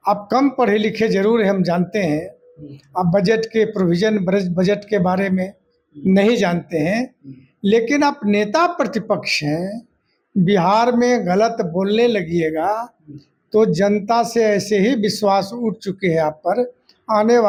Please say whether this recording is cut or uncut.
uncut